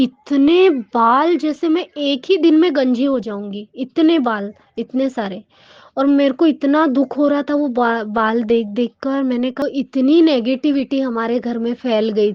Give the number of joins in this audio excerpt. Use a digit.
1